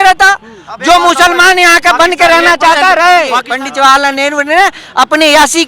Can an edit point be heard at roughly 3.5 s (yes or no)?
yes